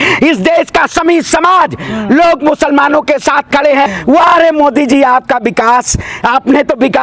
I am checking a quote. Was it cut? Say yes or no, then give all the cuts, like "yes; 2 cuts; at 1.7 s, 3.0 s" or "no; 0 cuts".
yes; 1 cut; at 3.9 s